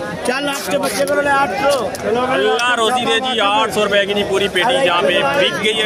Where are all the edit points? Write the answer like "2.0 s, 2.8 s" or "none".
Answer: none